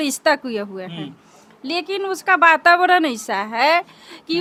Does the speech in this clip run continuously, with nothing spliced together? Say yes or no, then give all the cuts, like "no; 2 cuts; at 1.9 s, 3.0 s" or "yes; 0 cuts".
yes; 0 cuts